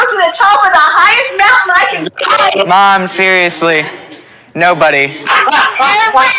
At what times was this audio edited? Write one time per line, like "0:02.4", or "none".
0:05.2